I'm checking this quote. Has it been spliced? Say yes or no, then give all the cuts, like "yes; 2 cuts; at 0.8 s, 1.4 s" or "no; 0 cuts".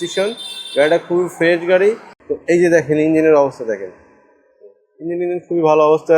yes; 1 cut; at 2.1 s